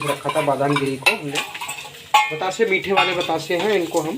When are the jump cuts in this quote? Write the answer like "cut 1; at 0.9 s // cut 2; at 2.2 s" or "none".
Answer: cut 1; at 1.3 s